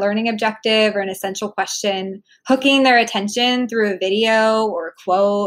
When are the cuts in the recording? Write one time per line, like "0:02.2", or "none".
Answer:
none